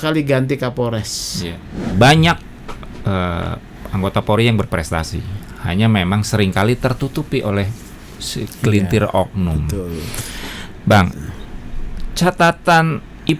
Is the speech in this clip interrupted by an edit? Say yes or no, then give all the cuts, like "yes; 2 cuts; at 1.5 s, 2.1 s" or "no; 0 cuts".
yes; 1 cut; at 1.9 s